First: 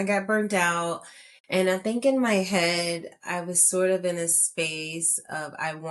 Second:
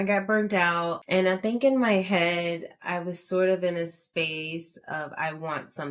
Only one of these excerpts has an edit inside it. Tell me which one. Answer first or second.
second